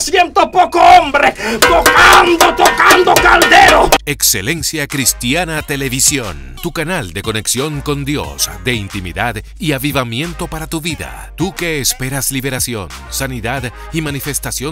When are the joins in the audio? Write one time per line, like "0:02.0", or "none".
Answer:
0:04.0